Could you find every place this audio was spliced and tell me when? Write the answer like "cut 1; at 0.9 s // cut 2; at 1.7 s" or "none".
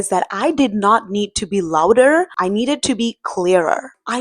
cut 1; at 2.3 s